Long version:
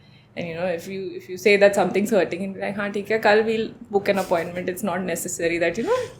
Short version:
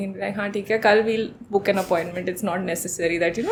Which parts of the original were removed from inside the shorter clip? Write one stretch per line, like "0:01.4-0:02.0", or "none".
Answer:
none